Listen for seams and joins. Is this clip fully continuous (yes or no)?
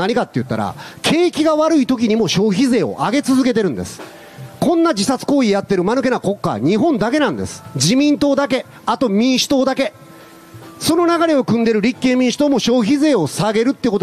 yes